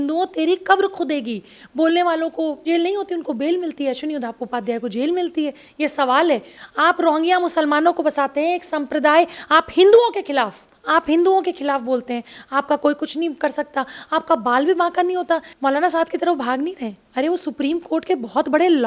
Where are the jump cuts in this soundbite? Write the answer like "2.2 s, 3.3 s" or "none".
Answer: 2.6 s, 6.6 s, 15.5 s